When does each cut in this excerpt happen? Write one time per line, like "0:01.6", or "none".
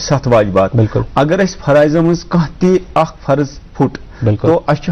none